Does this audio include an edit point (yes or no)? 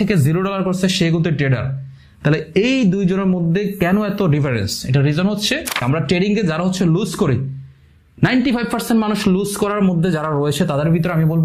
yes